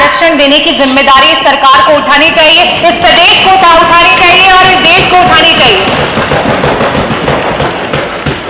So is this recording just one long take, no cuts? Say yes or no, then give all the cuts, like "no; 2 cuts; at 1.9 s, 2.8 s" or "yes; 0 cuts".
yes; 0 cuts